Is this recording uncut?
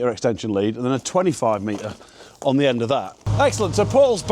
no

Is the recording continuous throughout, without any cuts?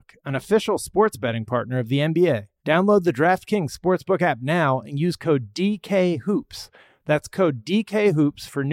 no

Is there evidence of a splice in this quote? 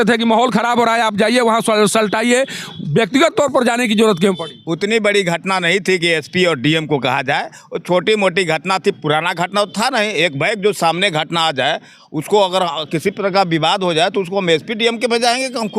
no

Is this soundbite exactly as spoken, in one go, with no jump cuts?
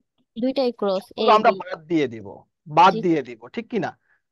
yes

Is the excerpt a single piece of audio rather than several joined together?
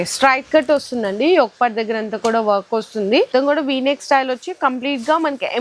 no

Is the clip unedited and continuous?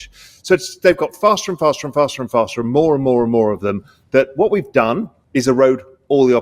no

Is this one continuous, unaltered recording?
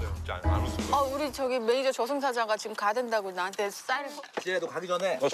no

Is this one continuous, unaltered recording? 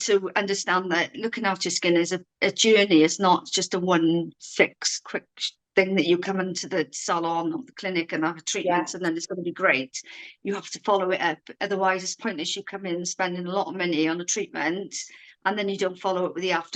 yes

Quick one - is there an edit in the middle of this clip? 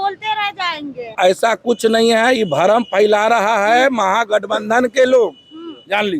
yes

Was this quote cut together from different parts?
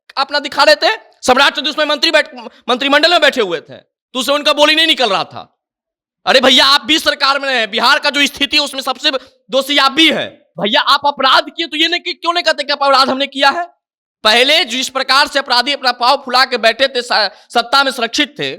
yes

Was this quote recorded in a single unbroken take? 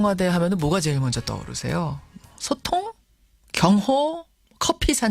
yes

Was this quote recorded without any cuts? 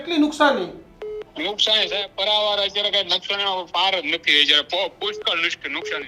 yes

